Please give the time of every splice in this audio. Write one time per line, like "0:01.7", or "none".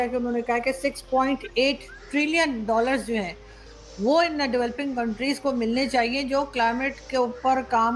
none